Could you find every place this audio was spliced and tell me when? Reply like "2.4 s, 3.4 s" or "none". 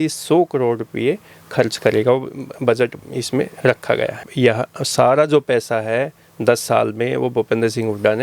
4.2 s